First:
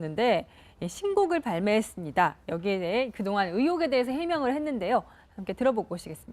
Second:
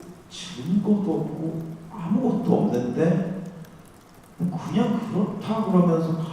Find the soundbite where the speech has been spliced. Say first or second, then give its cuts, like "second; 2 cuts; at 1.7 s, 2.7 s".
second; 1 cut; at 5.4 s